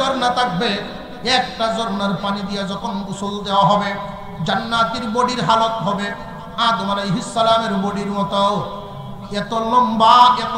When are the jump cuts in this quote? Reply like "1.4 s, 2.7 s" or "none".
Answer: none